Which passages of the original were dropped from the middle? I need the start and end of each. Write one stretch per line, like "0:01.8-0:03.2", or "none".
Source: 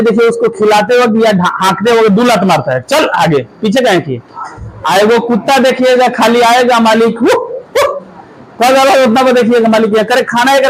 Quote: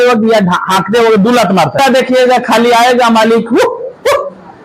0:02.7-0:05.4